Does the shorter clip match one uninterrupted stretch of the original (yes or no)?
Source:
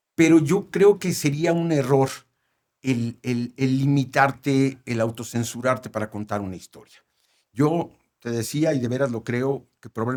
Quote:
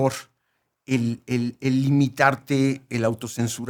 yes